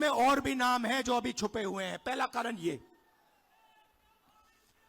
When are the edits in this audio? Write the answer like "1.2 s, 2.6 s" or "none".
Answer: none